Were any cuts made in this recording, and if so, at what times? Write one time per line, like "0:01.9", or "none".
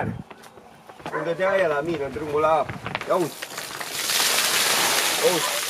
none